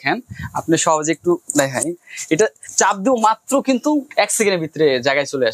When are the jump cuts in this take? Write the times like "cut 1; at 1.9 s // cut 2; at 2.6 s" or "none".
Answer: cut 1; at 2.6 s // cut 2; at 4.1 s